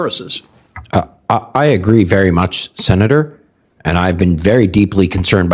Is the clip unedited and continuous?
yes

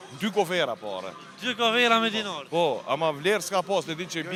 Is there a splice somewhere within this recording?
no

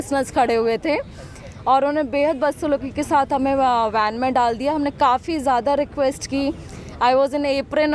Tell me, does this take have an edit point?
no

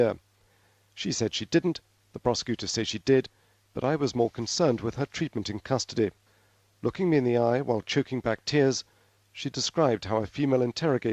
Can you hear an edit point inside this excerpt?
no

